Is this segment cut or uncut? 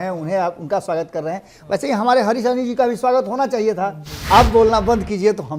cut